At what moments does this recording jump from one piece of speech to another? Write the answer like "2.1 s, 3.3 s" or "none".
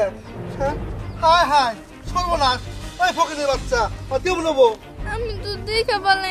4.9 s